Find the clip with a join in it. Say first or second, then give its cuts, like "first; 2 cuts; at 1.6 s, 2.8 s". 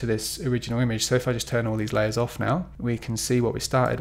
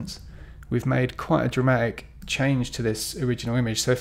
first; 1 cut; at 2.7 s